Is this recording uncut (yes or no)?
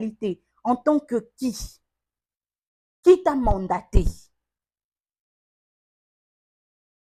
yes